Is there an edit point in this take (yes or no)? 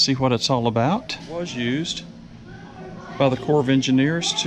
yes